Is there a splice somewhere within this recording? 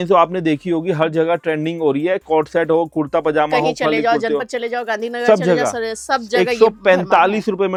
no; 0 cuts

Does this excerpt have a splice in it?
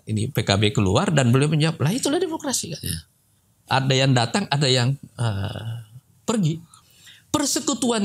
yes; 1 cut; at 6.8 s

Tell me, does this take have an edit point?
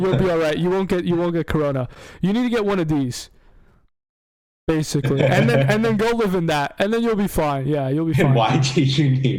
no; 0 cuts

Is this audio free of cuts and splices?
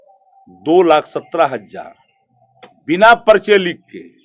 yes; 0 cuts

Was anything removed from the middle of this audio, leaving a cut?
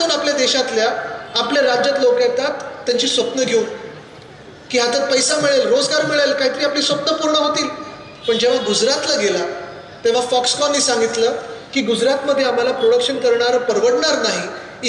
no; 0 cuts

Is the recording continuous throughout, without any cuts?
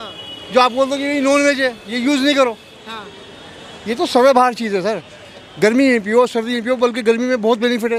yes; 0 cuts

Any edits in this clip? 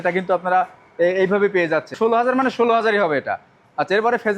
yes; 1 cut; at 1.9 s

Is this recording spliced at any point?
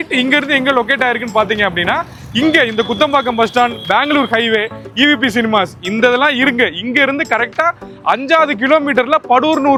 no; 0 cuts

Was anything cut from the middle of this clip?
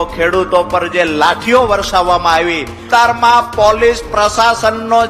yes; 1 cut; at 2.8 s

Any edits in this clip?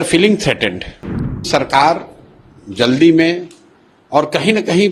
yes; 1 cut; at 1.4 s

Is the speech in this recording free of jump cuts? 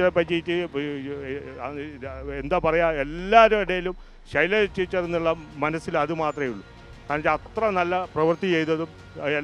yes; 0 cuts

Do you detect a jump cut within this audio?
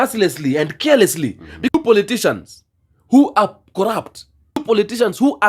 yes; 1 cut; at 1.7 s

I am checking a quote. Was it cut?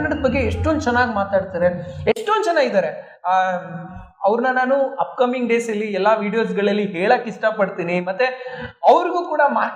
no; 0 cuts

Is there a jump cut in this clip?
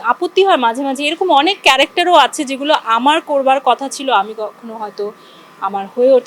no; 0 cuts

